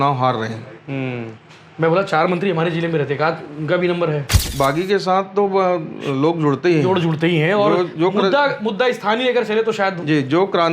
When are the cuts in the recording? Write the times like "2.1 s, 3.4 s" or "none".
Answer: 4.4 s